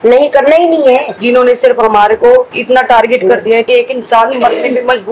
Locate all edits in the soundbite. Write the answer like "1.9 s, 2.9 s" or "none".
1.1 s, 3.7 s